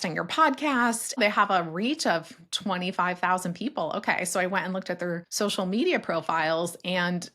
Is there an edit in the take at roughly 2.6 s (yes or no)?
no